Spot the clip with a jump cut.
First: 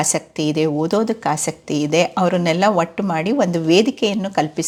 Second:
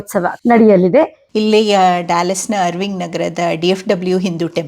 second; 1 cut; at 1.2 s

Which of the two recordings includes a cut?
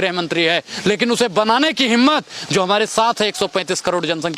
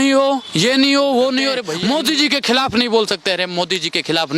second; 1 cut; at 1.7 s

